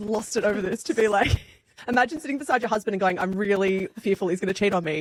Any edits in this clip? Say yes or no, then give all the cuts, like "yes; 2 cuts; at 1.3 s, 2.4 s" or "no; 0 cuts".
no; 0 cuts